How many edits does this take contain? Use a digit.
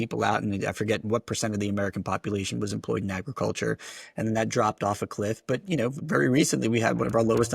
1